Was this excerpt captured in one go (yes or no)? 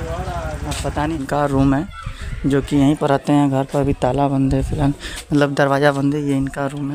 no